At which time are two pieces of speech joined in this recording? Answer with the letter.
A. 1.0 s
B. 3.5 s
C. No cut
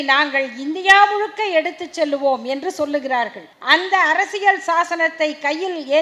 B